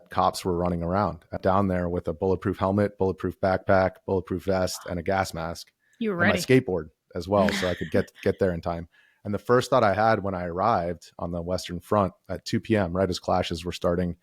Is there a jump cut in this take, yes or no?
yes